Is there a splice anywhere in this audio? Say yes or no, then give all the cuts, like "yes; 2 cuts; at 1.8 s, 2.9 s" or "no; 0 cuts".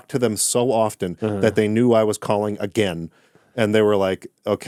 no; 0 cuts